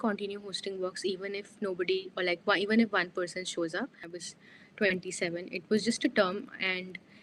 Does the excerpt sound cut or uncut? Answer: cut